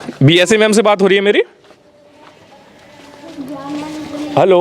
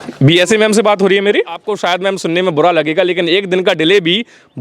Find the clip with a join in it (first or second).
second